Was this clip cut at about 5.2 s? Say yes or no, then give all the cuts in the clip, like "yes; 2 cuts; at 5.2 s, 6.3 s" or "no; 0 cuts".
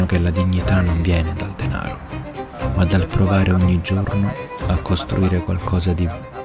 no; 0 cuts